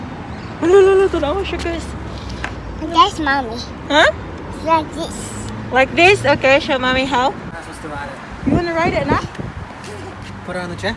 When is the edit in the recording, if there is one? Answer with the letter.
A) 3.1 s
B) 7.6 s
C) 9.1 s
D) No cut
B